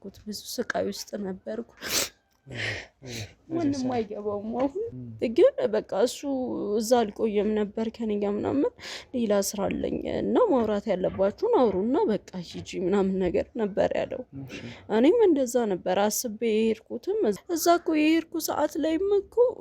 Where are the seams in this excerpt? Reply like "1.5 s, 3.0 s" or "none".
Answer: 4.9 s, 17.4 s